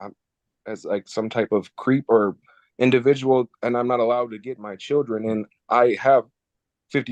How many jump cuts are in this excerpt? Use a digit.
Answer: 0